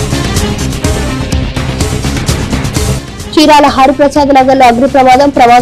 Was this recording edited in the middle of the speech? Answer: no; 0 cuts

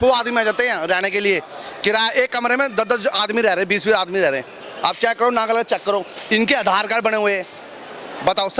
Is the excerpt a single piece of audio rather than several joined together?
yes; 0 cuts

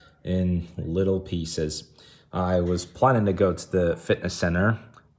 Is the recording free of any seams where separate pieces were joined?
yes; 0 cuts

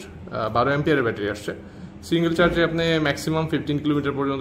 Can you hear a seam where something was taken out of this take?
no; 0 cuts

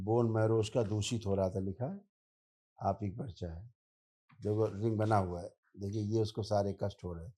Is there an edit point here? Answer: no; 0 cuts

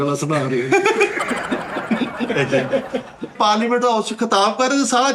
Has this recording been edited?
yes; 1 cut; at 3.3 s

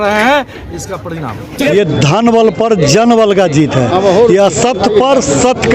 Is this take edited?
yes; 1 cut; at 1.7 s

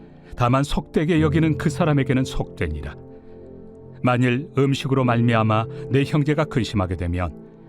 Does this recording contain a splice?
yes; 1 cut; at 3.3 s

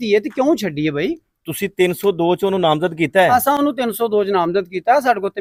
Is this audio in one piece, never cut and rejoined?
yes; 0 cuts

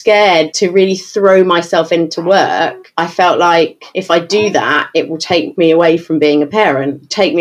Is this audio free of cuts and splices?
no; 2 cuts; at 2.8 s, 3.9 s

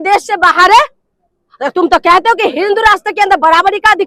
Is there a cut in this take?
no; 0 cuts

